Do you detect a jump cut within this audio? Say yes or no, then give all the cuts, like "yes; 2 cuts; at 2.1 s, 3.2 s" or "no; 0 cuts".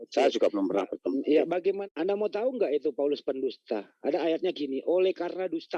yes; 1 cut; at 1.8 s